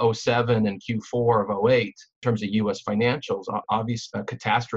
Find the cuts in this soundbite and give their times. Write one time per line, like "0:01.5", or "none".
0:02.2
0:03.6